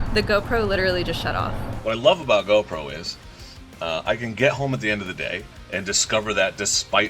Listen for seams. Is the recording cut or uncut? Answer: cut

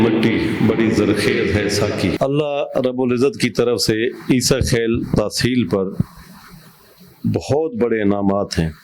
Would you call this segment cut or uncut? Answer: cut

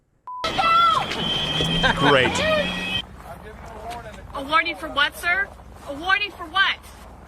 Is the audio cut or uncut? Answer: uncut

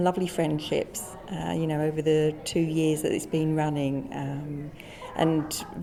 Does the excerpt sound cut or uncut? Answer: uncut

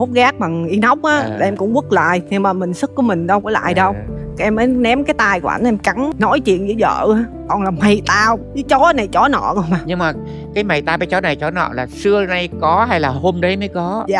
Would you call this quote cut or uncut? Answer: cut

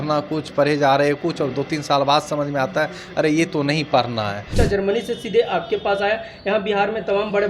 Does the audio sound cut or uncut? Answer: cut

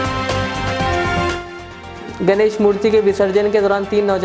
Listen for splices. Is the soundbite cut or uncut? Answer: cut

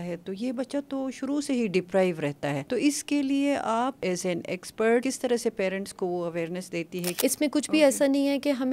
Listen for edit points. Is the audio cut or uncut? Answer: cut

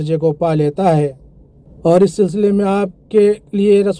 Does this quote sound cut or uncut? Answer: uncut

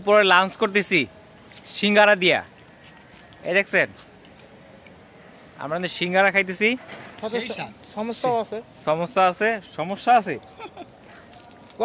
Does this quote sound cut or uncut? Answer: uncut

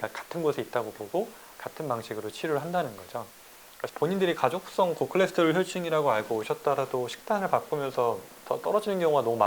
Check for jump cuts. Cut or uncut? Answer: cut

